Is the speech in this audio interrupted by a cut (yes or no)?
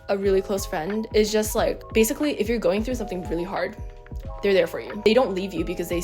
yes